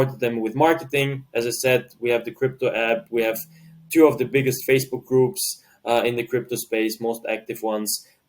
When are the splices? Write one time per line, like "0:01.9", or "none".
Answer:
none